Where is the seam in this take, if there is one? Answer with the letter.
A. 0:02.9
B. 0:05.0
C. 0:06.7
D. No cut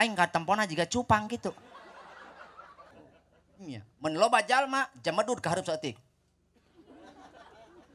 A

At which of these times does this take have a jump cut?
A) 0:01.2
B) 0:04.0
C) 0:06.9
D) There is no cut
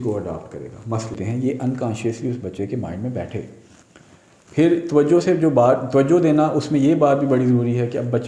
A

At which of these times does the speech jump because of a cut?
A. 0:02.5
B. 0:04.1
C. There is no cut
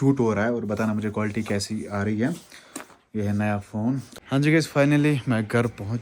B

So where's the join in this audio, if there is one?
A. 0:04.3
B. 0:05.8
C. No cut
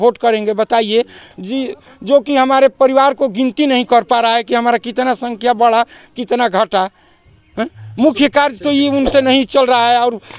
C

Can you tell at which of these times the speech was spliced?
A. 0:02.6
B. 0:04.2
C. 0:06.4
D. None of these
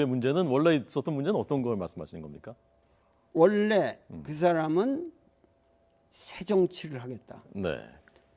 B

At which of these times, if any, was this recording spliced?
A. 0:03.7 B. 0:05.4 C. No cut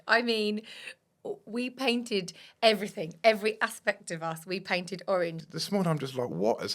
B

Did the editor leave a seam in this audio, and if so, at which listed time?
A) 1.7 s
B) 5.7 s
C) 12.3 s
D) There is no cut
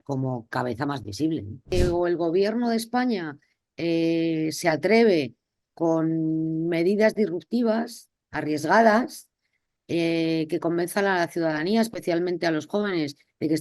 A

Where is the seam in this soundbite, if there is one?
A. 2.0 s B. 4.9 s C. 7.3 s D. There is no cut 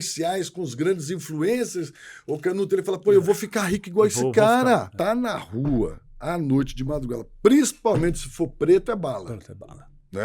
B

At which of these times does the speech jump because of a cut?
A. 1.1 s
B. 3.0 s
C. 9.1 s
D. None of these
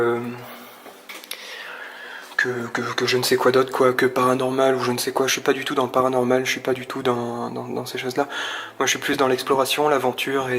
B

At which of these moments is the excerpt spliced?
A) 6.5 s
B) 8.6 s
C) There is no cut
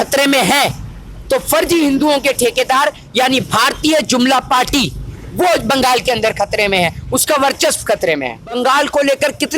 B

